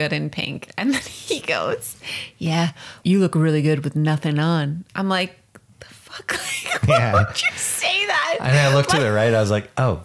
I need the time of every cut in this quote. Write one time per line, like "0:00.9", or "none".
0:03.0